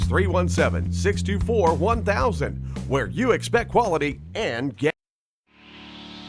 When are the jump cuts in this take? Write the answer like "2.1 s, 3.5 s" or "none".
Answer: 5.1 s